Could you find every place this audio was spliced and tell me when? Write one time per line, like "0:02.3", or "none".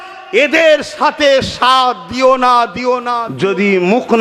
0:03.2

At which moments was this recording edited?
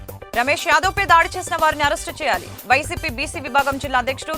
none

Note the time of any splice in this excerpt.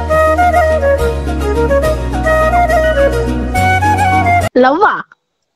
0:04.5

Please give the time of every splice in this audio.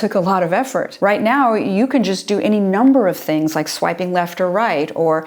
none

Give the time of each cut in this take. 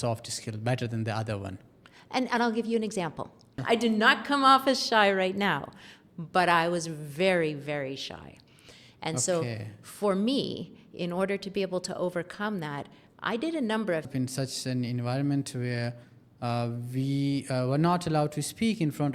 0:03.5
0:14.1

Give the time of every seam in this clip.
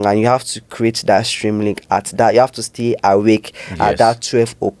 none

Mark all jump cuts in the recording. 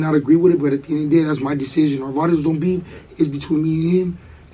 none

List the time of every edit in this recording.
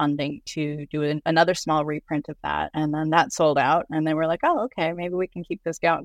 0:01.2
0:02.7

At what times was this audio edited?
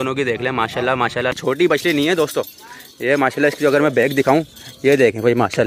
0:01.7

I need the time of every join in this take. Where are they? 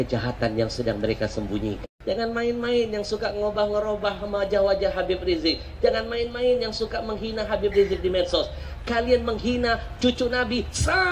0:01.9

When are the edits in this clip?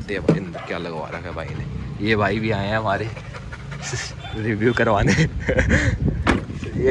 none

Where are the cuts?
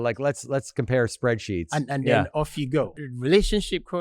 0:03.0

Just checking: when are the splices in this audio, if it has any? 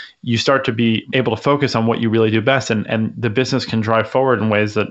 0:01.1

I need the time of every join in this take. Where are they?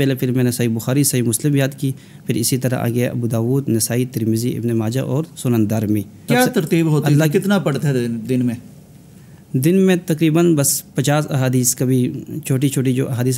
none

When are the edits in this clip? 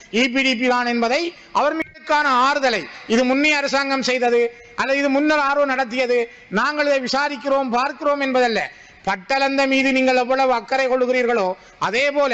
0:01.8

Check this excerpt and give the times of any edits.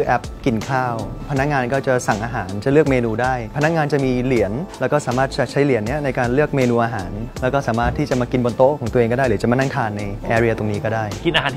none

